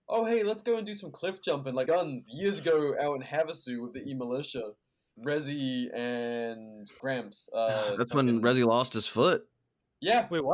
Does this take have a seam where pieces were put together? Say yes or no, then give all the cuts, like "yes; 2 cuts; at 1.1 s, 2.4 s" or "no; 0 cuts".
yes; 2 cuts; at 1.9 s, 5.1 s